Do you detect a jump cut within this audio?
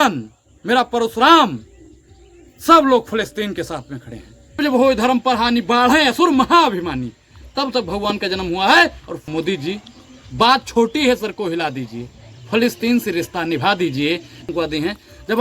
yes; 3 cuts; at 4.6 s, 9.3 s, 14.4 s

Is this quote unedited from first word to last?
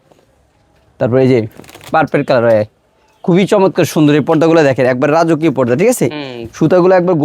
yes; 0 cuts

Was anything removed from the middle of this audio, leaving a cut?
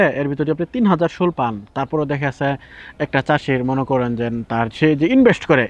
no; 0 cuts

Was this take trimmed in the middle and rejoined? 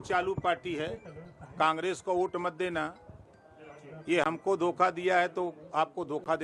no; 0 cuts

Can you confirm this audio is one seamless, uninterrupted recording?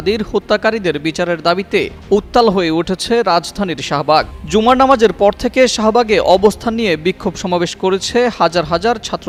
yes; 0 cuts

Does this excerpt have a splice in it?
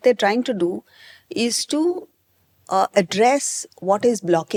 no; 0 cuts

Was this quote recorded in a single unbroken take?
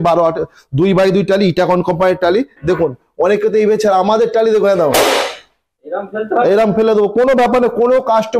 yes; 0 cuts

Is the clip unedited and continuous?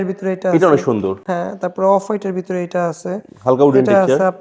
yes; 0 cuts

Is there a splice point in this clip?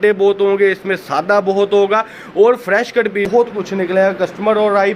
yes; 1 cut; at 3.2 s

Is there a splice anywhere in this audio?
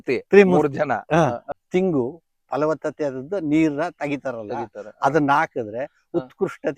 yes; 1 cut; at 1.5 s

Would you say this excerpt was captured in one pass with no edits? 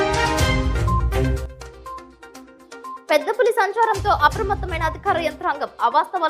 yes; 0 cuts

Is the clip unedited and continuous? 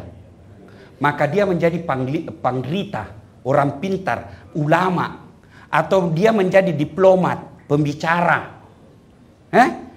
yes; 0 cuts

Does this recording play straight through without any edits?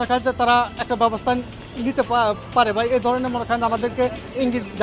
yes; 0 cuts

